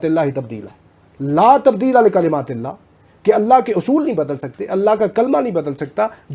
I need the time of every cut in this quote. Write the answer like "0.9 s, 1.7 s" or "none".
none